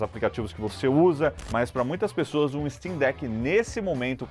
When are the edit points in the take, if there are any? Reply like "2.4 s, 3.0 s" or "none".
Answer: 1.4 s